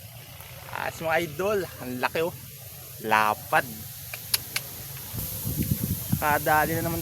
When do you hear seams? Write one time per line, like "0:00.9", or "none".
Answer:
0:05.2